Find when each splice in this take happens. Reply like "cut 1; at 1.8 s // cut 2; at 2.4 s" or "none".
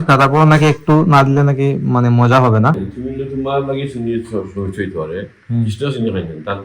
cut 1; at 2.9 s

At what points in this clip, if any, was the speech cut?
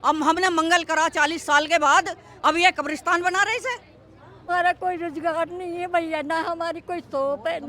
cut 1; at 4.5 s

